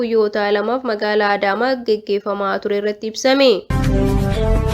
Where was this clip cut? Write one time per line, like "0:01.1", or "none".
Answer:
0:03.7